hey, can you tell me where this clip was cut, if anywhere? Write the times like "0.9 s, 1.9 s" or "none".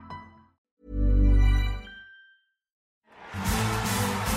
2.9 s